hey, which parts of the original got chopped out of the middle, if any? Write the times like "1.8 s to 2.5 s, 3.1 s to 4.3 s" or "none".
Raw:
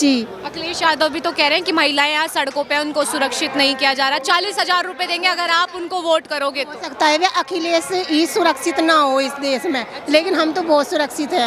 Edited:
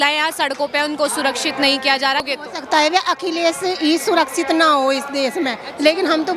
4.2 s to 6.5 s